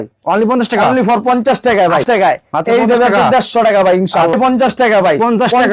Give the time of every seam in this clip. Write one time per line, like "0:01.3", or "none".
0:02.0
0:04.3

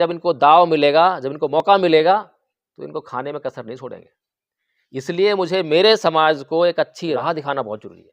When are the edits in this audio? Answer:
0:07.2

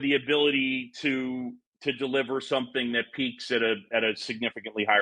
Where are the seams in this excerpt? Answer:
0:01.7

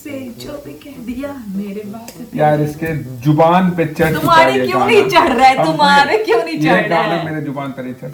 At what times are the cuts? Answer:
none

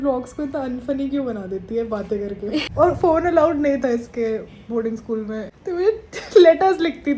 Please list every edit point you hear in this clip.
0:02.7
0:05.5

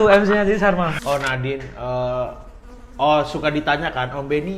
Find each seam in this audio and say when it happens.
0:01.0

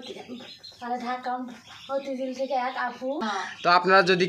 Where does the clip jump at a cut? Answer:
0:03.3

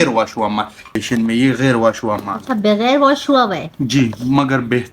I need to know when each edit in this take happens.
0:01.0

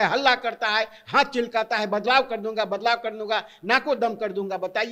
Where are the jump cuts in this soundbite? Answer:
none

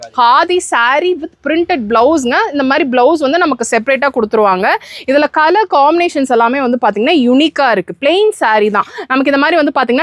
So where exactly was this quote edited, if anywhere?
none

